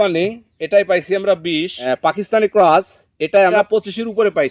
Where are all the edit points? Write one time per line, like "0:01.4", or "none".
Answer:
0:01.7